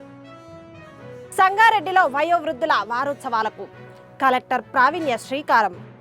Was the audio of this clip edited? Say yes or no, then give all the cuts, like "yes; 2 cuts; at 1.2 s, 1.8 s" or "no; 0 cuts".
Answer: no; 0 cuts